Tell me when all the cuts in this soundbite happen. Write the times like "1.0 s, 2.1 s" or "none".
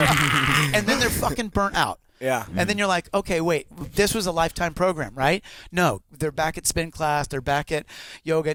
none